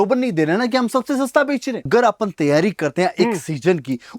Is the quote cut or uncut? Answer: cut